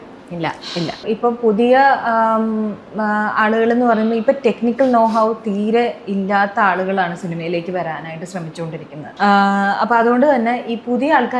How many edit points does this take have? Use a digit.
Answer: 2